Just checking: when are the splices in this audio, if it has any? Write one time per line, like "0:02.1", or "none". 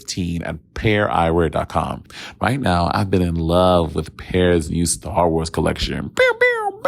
0:02.0